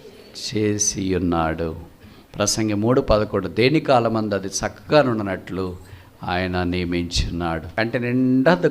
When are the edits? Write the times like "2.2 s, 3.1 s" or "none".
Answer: 7.6 s